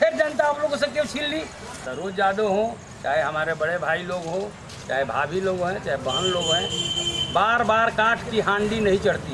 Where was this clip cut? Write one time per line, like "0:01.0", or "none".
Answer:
0:01.8

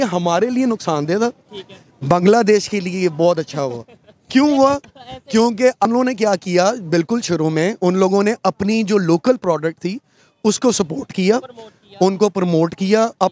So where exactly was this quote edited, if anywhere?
0:05.9

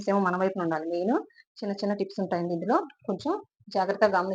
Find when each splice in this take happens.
none

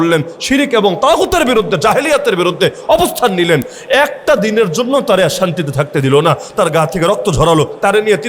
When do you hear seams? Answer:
none

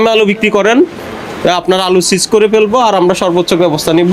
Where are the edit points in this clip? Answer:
none

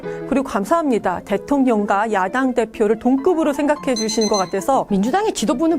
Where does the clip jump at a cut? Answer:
0:04.9

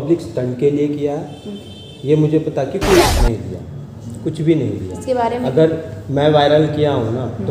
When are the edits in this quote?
0:03.2

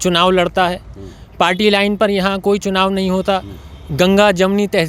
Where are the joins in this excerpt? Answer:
none

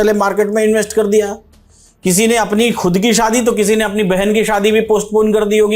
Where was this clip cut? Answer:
none

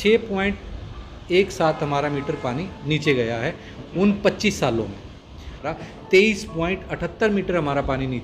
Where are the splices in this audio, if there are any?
0:05.6

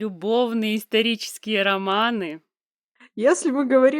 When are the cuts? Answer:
0:03.0

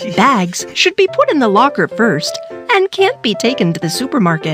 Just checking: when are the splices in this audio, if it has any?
none

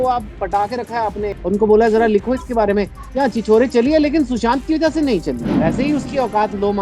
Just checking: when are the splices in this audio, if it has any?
0:01.4
0:05.5

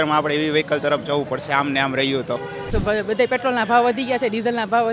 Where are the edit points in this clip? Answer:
0:02.7

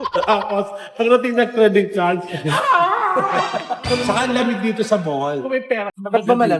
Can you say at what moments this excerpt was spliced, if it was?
0:03.8

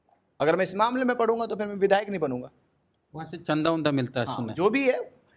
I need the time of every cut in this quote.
none

